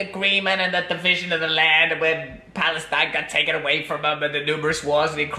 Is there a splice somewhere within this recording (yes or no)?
no